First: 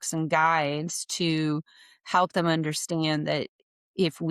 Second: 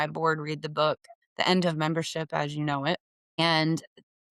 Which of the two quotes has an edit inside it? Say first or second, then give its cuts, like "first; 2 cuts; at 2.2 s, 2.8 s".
second; 2 cuts; at 1.2 s, 3.4 s